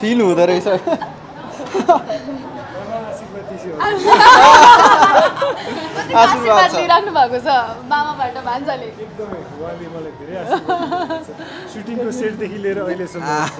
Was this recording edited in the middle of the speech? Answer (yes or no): no